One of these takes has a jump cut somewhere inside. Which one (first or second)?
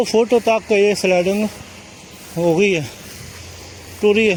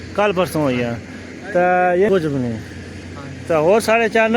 second